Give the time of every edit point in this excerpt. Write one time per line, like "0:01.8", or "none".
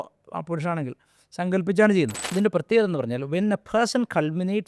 0:02.2